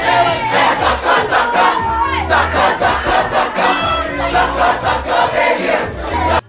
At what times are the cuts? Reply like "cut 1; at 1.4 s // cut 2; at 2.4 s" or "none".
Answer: none